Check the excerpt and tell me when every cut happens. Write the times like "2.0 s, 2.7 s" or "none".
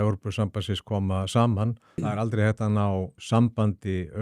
1.9 s, 3.2 s

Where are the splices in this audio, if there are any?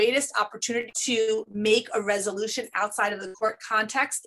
0.9 s

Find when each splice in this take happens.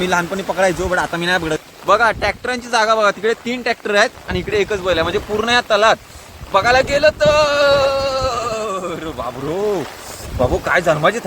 1.6 s

